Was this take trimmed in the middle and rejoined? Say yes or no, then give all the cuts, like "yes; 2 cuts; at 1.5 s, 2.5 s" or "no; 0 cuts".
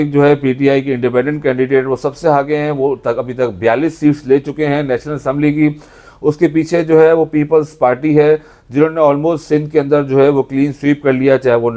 no; 0 cuts